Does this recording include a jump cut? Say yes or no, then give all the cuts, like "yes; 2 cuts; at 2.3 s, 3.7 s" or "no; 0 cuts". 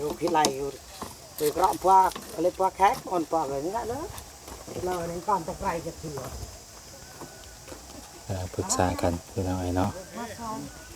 no; 0 cuts